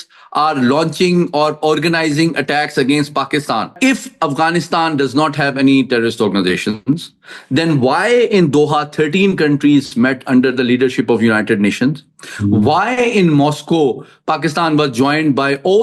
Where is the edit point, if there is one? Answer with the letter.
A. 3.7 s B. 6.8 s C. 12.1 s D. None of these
A